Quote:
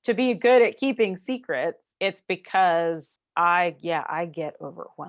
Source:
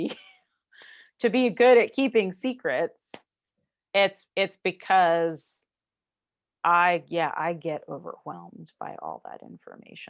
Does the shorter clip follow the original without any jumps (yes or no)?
no